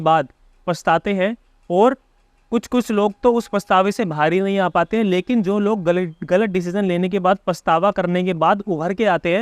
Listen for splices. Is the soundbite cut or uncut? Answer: uncut